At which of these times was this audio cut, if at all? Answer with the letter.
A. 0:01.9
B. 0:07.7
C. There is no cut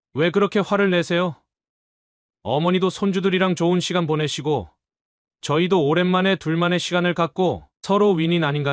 C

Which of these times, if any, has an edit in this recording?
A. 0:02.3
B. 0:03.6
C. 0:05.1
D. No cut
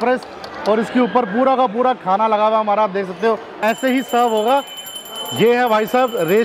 B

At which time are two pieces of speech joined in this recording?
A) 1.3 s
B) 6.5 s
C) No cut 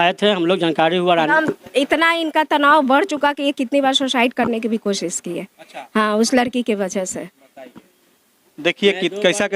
A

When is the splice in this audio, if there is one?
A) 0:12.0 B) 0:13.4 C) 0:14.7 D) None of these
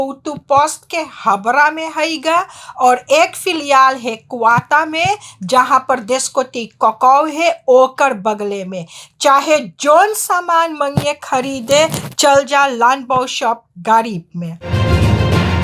C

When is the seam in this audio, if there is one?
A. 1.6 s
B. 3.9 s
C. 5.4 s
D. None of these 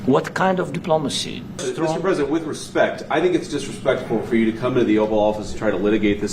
A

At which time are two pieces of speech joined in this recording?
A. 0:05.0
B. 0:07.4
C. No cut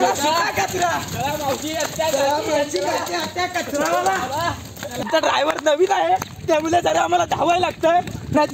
A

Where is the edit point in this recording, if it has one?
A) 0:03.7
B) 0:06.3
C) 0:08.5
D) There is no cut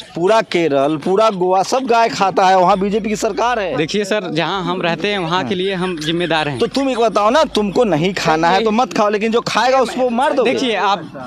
A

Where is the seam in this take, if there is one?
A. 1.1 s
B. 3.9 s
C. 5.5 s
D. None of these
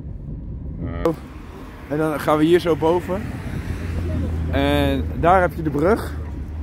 A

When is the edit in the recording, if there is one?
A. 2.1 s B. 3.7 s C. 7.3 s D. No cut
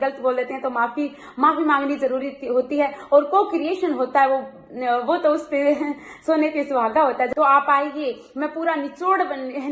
C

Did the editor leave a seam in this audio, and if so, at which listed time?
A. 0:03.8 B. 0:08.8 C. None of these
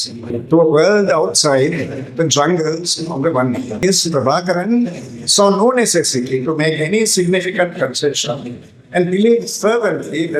A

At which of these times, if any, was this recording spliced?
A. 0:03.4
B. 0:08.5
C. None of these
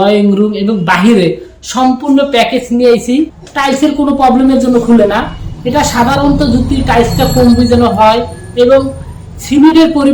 A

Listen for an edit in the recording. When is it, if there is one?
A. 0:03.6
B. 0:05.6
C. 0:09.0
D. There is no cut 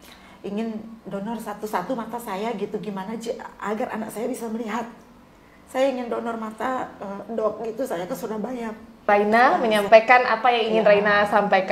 C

